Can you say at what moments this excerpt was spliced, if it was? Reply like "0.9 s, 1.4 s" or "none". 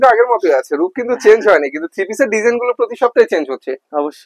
none